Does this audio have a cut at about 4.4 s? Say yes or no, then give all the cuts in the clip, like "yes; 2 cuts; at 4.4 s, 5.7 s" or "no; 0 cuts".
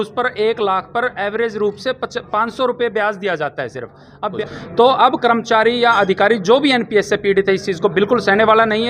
yes; 1 cut; at 4.4 s